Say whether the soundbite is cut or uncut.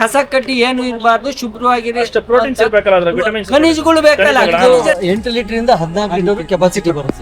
cut